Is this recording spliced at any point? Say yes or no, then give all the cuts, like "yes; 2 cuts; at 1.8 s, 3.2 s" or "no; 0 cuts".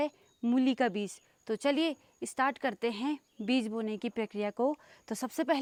no; 0 cuts